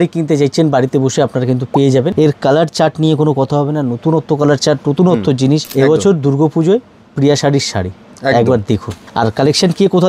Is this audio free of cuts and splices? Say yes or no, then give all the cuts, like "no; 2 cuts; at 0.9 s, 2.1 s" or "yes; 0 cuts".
no; 3 cuts; at 2.1 s, 5.7 s, 9.0 s